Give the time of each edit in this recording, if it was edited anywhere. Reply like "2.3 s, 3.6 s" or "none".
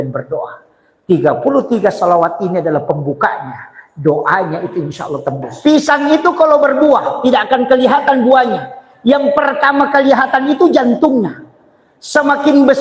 5.6 s